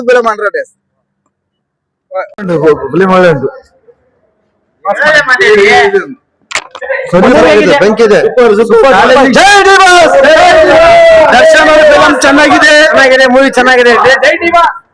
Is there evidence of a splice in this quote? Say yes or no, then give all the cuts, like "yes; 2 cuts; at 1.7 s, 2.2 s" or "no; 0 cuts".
yes; 1 cut; at 2.3 s